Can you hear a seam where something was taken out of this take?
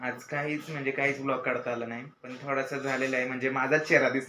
yes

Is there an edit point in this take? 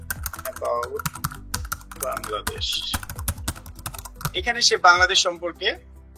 no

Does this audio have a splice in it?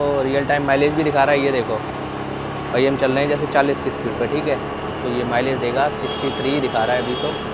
no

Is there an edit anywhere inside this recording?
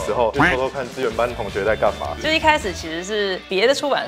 yes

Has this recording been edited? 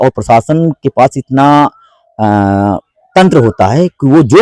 no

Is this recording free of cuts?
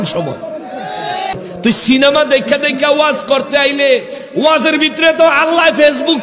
no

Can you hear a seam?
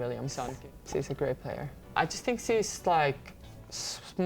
yes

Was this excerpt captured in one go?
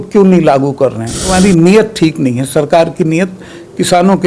no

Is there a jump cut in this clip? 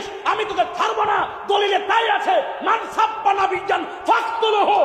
no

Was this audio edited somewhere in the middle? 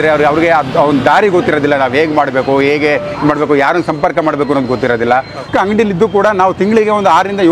yes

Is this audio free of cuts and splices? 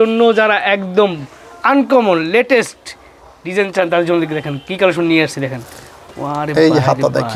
yes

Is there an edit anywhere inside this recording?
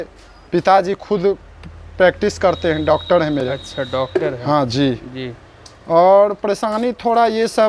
no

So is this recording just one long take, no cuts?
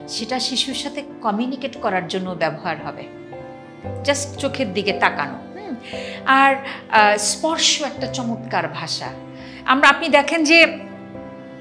yes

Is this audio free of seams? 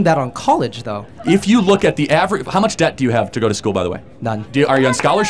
no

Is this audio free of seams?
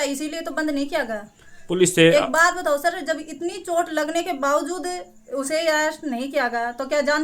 yes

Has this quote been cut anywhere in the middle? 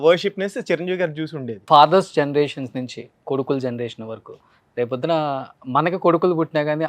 yes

